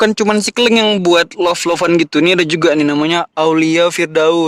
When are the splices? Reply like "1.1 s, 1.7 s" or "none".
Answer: none